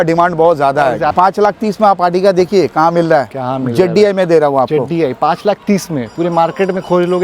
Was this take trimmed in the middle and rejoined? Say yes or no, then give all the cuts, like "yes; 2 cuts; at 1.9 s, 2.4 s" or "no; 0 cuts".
yes; 1 cut; at 1.1 s